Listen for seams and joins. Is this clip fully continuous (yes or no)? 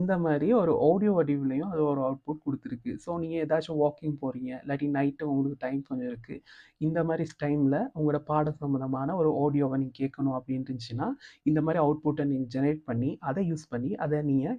yes